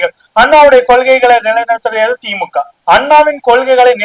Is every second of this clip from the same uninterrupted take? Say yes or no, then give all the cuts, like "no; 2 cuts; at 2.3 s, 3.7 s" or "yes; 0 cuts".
no; 1 cut; at 2.8 s